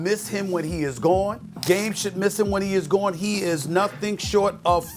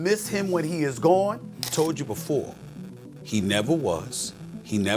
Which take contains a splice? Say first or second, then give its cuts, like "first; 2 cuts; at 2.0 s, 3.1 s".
second; 1 cut; at 1.5 s